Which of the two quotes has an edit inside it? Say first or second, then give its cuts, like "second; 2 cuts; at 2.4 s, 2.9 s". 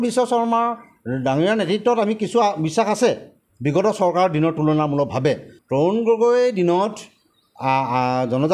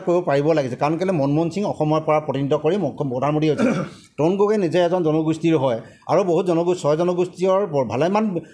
first; 1 cut; at 5.5 s